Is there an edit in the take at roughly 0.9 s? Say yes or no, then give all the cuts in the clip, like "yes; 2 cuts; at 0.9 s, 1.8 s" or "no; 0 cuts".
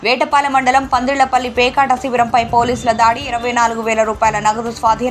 no; 0 cuts